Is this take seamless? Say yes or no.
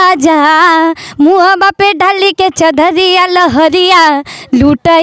yes